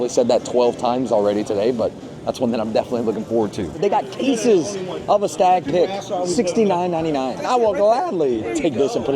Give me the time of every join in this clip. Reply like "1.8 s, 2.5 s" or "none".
3.8 s, 7.4 s